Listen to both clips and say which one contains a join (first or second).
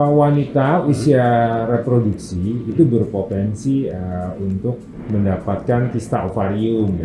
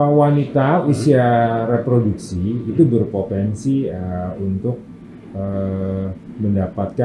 first